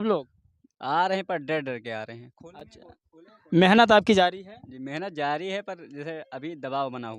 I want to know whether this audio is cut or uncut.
uncut